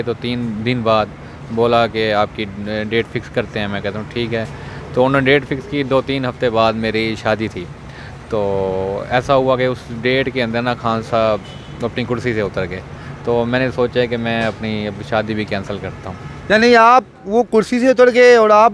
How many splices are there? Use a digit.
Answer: 0